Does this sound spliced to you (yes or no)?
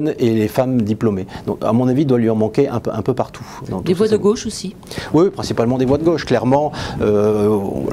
no